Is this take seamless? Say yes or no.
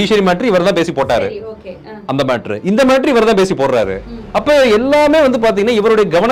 yes